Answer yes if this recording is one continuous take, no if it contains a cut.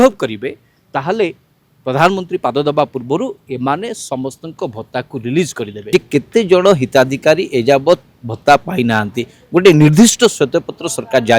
no